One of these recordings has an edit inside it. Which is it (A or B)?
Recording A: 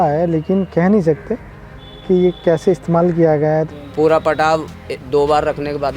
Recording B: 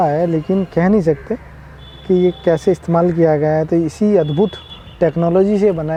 A